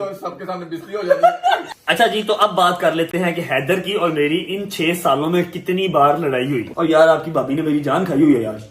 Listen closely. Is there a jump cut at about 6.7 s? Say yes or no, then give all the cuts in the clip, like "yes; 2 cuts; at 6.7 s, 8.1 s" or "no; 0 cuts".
yes; 2 cuts; at 1.7 s, 6.7 s